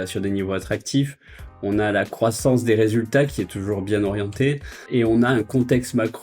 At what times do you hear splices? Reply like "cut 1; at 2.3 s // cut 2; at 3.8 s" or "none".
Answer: cut 1; at 4.7 s